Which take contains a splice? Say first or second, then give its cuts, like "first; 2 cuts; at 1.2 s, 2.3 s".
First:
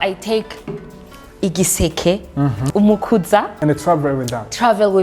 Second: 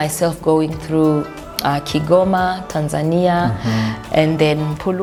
first; 2 cuts; at 2.6 s, 3.5 s